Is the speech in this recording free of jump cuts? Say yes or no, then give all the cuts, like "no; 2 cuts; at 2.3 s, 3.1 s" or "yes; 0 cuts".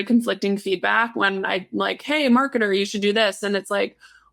yes; 0 cuts